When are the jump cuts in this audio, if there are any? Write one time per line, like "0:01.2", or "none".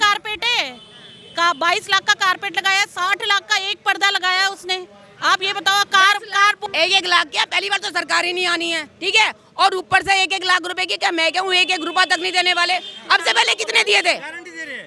0:06.6